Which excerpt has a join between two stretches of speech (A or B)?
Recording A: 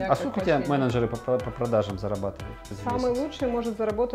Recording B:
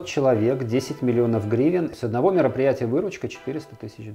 A